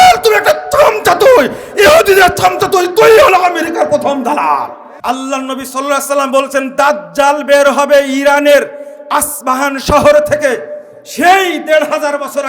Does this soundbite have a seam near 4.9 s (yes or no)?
yes